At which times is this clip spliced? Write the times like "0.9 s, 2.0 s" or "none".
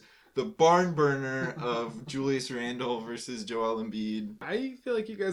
4.4 s